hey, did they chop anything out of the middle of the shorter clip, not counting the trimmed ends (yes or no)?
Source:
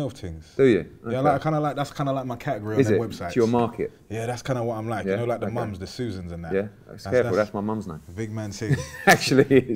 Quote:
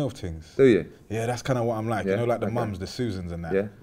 yes